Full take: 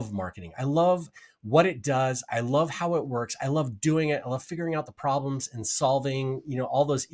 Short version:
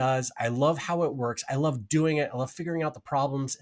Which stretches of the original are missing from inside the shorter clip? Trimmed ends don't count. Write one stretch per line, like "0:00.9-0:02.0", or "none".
none

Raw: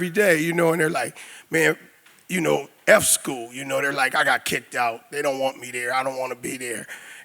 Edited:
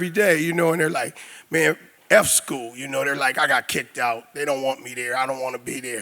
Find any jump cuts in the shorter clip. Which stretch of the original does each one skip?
0:01.9-0:02.7

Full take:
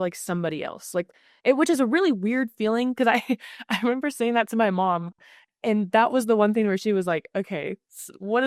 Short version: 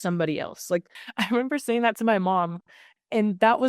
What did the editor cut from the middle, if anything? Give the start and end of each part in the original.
0:01.3-0:03.5

